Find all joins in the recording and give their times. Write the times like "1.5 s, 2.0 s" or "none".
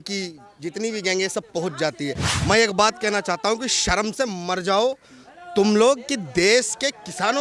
2.3 s

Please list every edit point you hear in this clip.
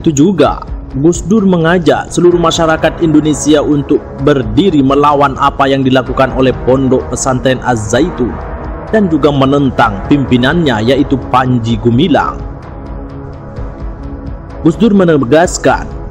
12.7 s, 14.6 s

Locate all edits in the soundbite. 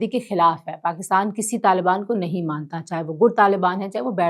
none

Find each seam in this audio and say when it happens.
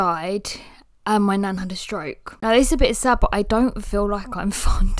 2.3 s

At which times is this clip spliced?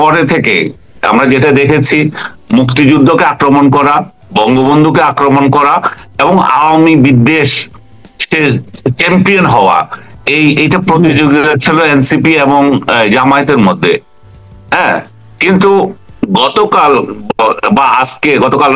none

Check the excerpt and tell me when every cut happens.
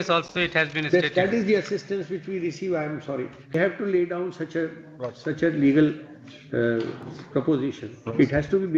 3.5 s

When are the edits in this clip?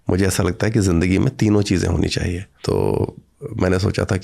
2.5 s

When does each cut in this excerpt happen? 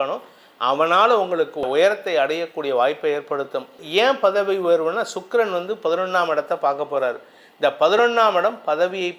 3.8 s

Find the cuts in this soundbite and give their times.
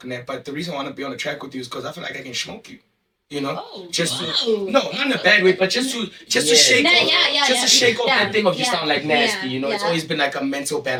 none

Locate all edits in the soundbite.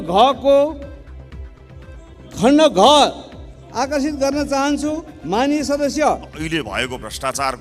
1.0 s, 2.3 s, 6.4 s

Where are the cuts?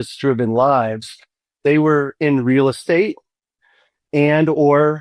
4.0 s

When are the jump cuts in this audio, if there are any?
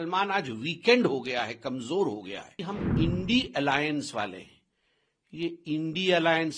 2.6 s

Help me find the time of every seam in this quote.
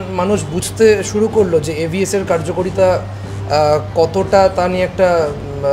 none

